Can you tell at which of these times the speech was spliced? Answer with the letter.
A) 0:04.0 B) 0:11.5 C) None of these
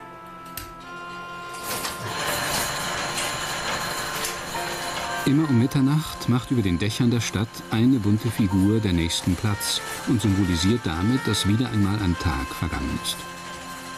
A